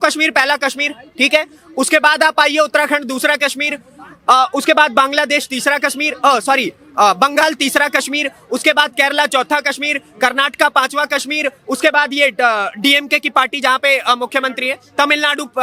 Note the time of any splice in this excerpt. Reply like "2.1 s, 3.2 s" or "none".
none